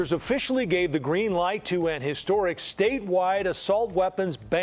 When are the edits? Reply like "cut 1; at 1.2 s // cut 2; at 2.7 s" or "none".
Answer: none